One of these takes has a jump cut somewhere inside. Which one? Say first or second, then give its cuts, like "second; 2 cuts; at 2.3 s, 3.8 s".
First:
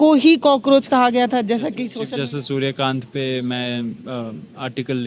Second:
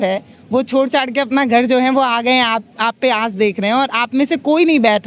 first; 1 cut; at 1.9 s